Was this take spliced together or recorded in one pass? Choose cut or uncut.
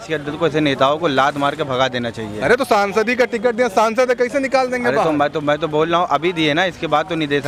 uncut